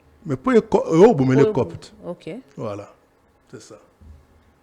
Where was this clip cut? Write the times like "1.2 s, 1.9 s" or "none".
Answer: none